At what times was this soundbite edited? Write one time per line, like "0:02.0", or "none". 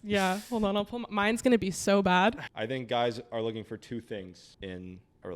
0:02.5
0:04.4